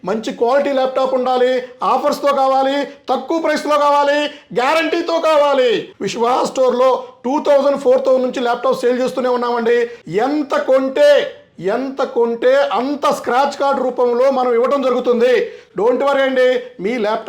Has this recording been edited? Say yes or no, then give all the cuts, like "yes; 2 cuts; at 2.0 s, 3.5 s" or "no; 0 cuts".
yes; 3 cuts; at 5.9 s, 10.0 s, 15.6 s